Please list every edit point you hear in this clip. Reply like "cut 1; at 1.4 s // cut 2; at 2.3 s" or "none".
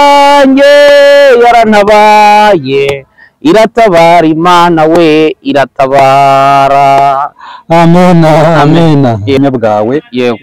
cut 1; at 9.4 s